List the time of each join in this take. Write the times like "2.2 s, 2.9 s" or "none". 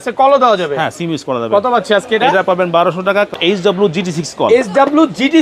3.3 s